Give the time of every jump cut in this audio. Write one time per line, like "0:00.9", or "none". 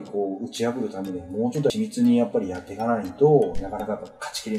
0:01.7